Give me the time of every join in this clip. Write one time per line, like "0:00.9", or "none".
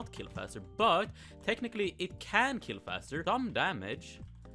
0:03.2